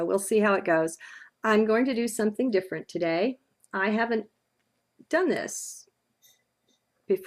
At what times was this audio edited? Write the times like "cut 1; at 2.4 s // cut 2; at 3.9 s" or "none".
cut 1; at 1.7 s